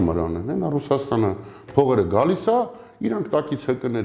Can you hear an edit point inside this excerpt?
no; 0 cuts

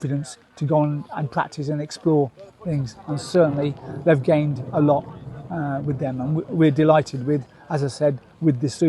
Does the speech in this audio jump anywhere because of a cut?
no; 0 cuts

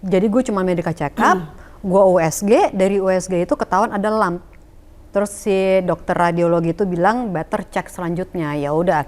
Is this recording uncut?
yes; 0 cuts

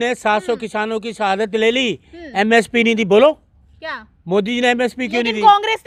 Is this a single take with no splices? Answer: yes; 0 cuts

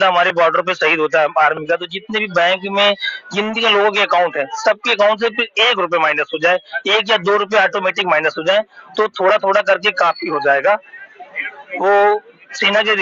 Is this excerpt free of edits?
yes; 0 cuts

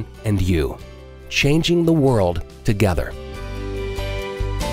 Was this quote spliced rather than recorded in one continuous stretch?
yes; 1 cut; at 3.3 s

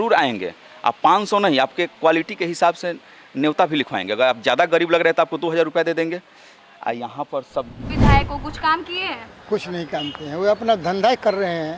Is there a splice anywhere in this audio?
yes; 1 cut; at 7.9 s

